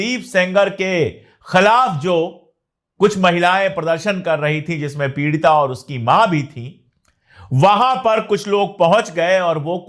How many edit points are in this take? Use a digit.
0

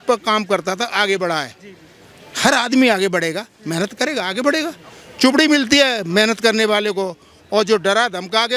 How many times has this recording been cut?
0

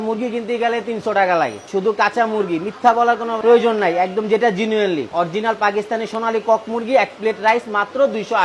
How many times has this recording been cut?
0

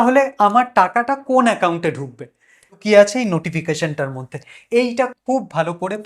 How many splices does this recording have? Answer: 1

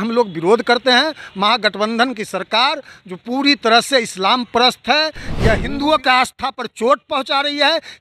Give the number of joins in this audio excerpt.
1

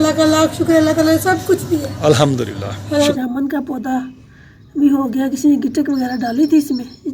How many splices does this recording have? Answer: 1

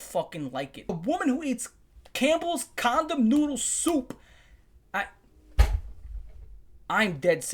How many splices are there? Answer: 1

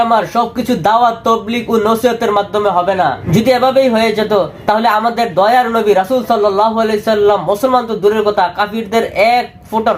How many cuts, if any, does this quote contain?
0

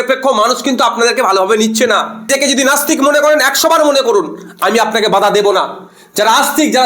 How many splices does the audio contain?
1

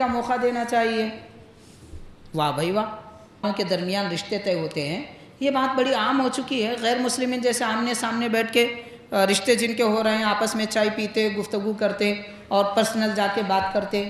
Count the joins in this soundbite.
1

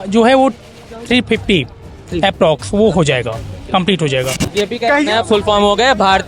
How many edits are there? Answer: 1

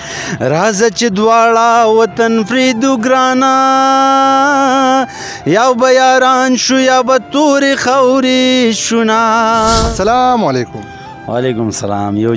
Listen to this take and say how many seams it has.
1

